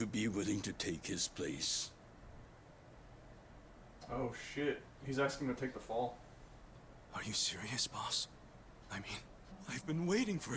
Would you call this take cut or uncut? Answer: cut